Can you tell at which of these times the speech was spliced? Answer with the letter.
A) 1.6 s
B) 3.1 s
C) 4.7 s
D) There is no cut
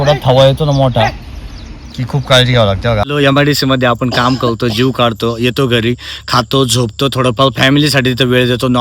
B